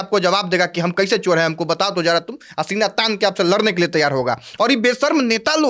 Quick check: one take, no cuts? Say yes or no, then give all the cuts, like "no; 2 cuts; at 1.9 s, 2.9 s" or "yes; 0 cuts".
yes; 0 cuts